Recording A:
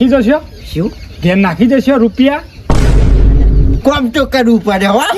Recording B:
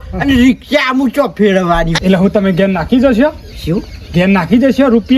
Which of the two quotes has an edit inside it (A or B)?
B